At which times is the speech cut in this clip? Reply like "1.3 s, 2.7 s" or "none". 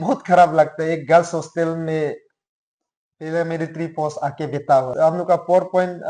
4.9 s